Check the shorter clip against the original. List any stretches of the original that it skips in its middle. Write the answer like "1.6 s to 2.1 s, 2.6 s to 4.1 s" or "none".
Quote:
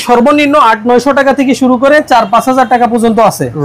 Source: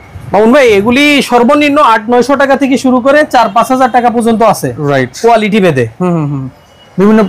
none